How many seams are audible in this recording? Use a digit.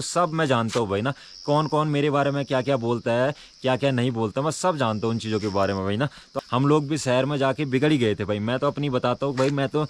1